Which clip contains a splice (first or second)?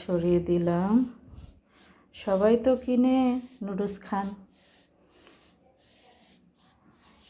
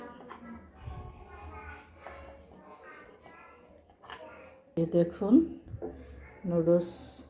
second